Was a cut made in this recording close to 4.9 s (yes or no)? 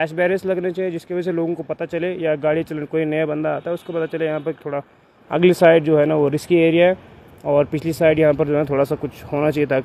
no